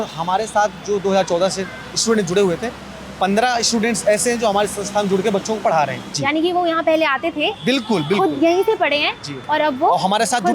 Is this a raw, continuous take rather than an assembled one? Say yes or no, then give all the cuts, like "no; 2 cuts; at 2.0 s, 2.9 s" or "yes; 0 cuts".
no; 1 cut; at 6.1 s